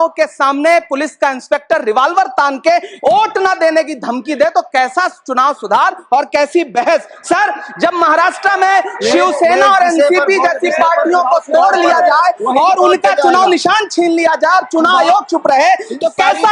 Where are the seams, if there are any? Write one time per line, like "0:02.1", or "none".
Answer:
none